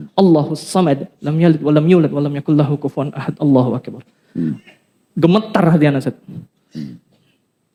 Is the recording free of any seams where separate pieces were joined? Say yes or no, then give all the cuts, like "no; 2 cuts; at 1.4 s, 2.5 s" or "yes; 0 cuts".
yes; 0 cuts